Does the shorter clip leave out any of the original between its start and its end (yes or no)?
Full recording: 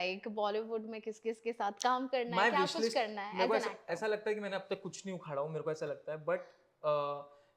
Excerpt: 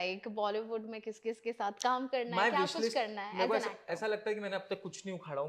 no